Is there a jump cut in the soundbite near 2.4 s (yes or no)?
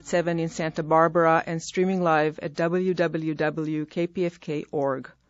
no